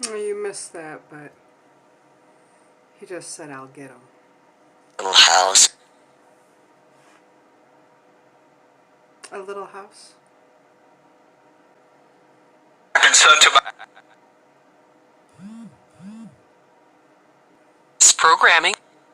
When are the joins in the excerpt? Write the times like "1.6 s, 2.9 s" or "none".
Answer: 7.5 s, 11.8 s, 17.6 s